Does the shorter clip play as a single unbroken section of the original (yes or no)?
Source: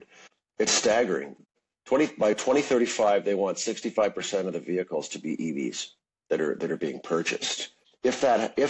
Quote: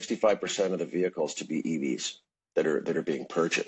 yes